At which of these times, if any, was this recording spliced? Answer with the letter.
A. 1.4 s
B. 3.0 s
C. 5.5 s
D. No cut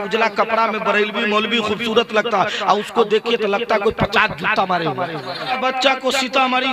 C